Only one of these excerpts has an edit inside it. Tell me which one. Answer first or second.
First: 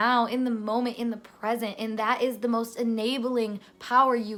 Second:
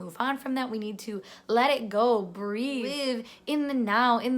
second